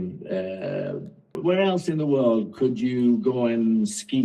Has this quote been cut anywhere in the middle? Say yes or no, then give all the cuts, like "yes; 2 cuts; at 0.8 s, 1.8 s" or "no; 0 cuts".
yes; 1 cut; at 1.3 s